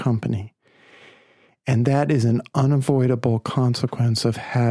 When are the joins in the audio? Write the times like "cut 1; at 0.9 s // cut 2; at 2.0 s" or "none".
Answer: none